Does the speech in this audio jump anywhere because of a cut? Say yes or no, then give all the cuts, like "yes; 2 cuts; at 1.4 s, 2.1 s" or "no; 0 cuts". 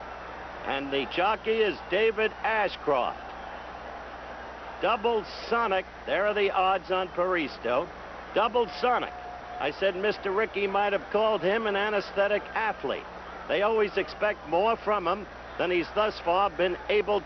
no; 0 cuts